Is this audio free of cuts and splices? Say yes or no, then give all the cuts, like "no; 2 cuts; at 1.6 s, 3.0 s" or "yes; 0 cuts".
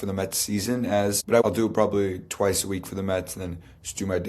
no; 1 cut; at 1.3 s